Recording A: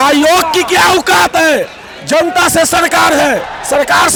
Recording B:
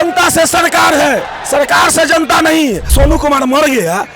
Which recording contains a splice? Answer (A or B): B